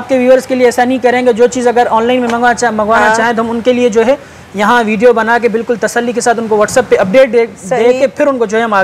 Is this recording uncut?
yes; 0 cuts

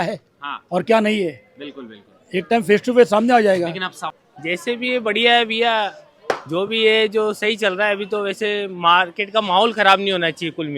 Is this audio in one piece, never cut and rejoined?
no; 1 cut; at 4.0 s

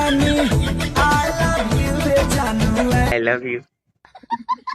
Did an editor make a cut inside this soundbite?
yes; 1 cut; at 3.1 s

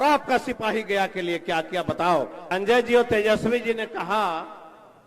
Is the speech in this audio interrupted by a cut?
yes; 1 cut; at 2.5 s

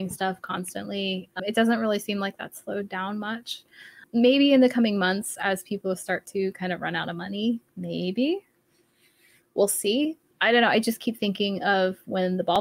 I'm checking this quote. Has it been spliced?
yes; 3 cuts; at 1.4 s, 4.0 s, 10.2 s

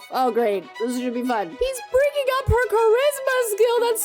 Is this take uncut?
no; 1 cut; at 1.5 s

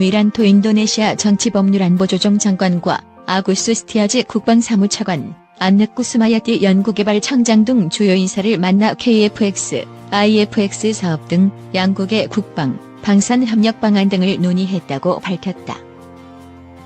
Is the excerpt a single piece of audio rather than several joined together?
no; 1 cut; at 15.8 s

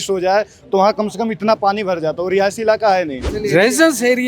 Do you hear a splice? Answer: yes; 1 cut; at 3.2 s

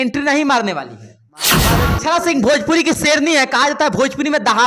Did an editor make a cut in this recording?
yes; 1 cut; at 1.7 s

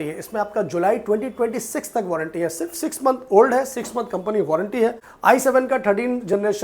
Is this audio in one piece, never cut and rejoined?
no; 1 cut; at 5.1 s

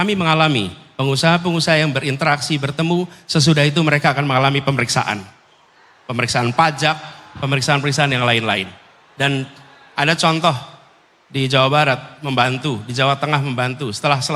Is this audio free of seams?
yes; 0 cuts

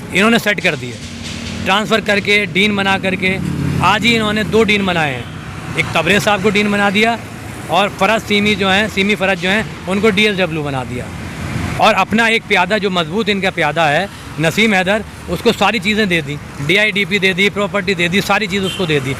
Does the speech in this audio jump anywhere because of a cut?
no; 0 cuts

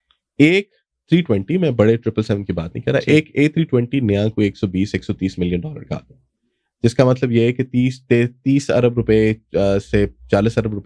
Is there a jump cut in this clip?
no; 0 cuts

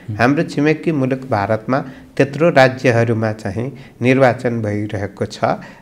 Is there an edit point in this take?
no; 0 cuts

